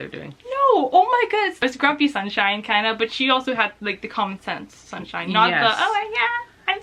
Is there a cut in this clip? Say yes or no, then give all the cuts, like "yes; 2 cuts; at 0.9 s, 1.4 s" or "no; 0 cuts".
yes; 1 cut; at 1.6 s